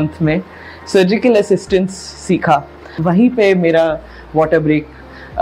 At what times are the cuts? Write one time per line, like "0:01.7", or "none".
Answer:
0:02.9